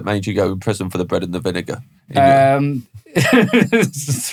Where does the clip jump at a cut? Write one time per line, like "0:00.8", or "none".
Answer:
none